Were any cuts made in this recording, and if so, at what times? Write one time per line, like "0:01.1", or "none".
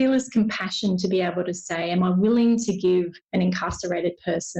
0:03.2